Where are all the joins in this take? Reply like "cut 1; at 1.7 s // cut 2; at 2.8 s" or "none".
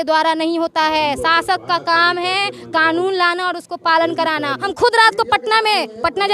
cut 1; at 4.6 s